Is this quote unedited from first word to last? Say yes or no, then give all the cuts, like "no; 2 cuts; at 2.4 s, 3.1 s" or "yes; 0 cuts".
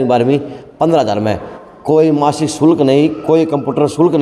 yes; 0 cuts